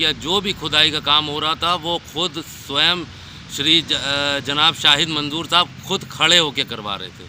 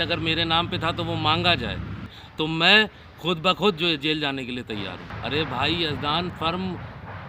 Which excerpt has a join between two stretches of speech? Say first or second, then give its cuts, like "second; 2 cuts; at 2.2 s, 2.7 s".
second; 2 cuts; at 2.2 s, 5.1 s